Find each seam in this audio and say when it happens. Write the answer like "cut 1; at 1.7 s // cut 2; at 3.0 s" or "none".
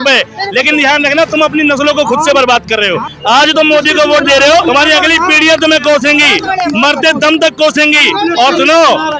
cut 1; at 3.1 s // cut 2; at 4.7 s